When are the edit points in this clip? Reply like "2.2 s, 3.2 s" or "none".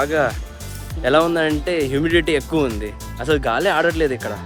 none